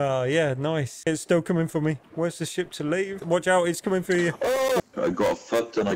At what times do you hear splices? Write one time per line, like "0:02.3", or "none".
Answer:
0:01.1
0:03.2
0:04.8